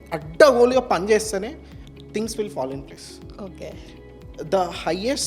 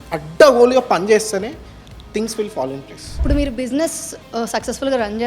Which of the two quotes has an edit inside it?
second; 1 cut; at 3.2 s

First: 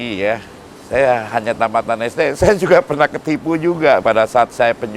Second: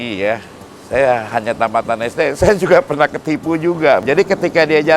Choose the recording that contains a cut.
second; 1 cut; at 4.0 s

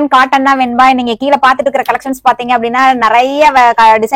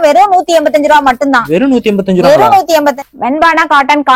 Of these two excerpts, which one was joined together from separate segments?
second; 1 cut; at 3.0 s

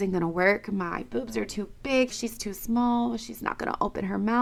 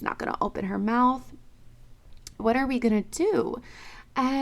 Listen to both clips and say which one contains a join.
second; 1 cut; at 2.4 s

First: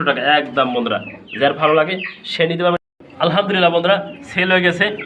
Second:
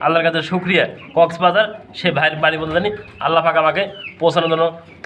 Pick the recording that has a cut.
first; 1 cut; at 2.8 s

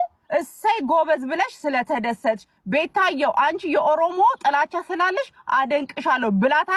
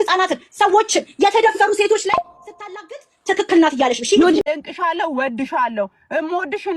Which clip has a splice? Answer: second; 1 cut; at 4.4 s

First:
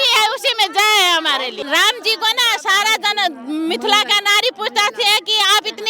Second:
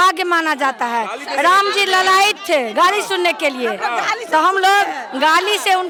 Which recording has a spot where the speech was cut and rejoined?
first; 1 cut; at 1.6 s

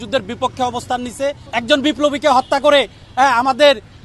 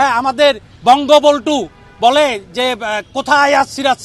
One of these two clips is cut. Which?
first; 1 cut; at 1.5 s

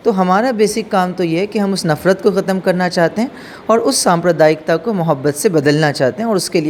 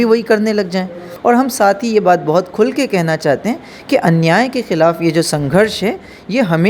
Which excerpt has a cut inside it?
second; 1 cut; at 1.1 s

